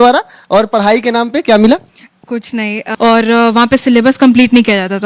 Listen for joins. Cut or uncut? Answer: cut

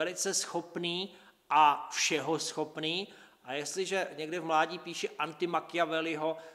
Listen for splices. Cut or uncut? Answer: cut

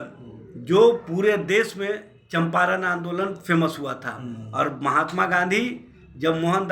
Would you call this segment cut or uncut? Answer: uncut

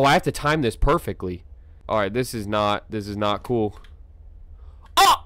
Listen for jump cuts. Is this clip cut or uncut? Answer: cut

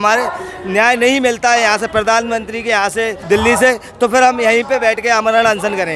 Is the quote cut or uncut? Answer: cut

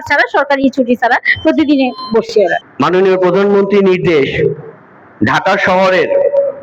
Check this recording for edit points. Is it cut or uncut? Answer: cut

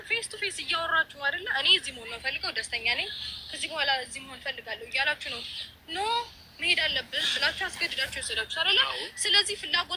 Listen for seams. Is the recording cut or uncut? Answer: uncut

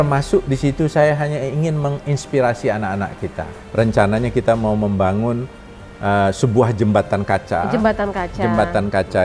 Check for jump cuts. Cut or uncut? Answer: cut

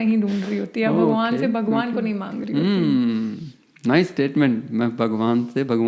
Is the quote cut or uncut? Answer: uncut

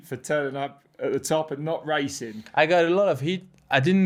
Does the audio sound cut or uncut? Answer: uncut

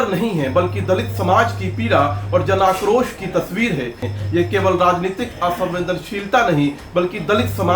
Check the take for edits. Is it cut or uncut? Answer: cut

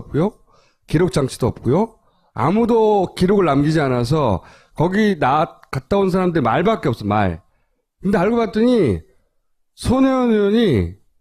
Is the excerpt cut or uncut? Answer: uncut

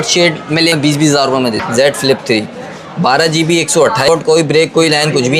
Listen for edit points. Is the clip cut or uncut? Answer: cut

